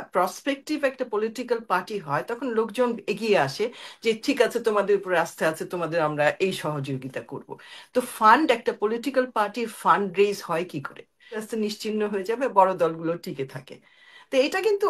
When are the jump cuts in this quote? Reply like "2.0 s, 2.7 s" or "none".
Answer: 11.4 s